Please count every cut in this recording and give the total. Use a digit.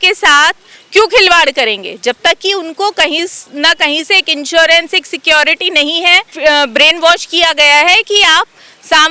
1